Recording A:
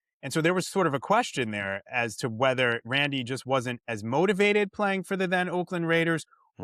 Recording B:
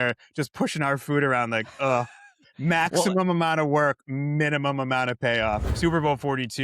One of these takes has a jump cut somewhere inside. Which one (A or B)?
B